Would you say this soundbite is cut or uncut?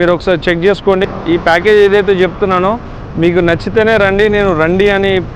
cut